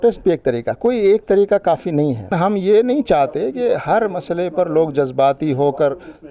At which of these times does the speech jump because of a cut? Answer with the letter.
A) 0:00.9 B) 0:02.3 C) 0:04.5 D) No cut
B